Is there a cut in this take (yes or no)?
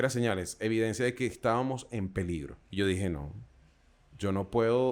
yes